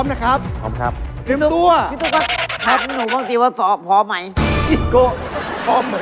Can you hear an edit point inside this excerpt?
yes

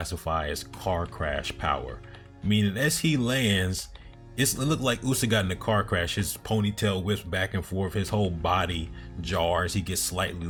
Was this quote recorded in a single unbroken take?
yes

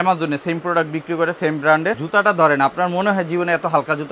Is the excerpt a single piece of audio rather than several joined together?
no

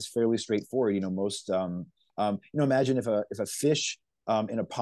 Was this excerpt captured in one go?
no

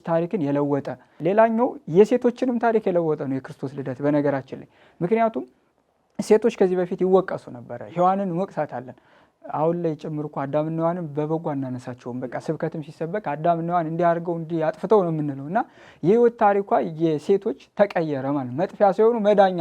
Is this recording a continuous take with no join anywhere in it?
no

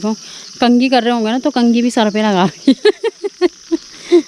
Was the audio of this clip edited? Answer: no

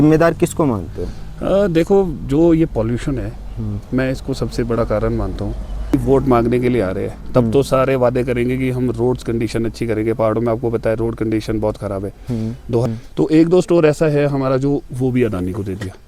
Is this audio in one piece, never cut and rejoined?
no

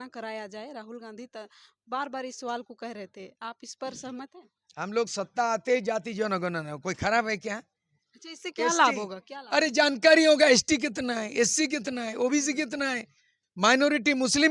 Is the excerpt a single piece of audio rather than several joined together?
yes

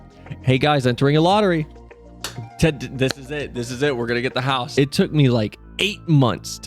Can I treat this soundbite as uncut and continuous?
no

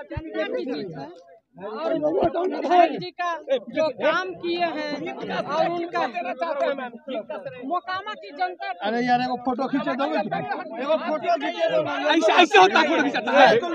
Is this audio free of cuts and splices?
yes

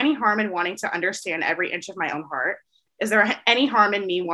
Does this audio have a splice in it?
no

